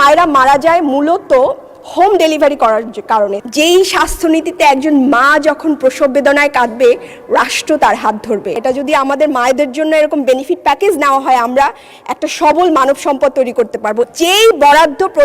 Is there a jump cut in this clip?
yes; 3 cuts; at 3.4 s, 8.6 s, 14.1 s

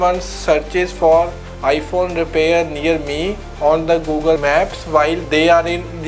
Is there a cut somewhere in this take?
yes; 1 cut; at 4.4 s

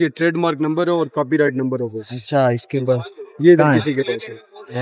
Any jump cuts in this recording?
no; 0 cuts

